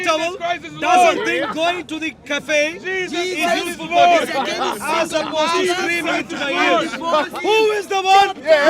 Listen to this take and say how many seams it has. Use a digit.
1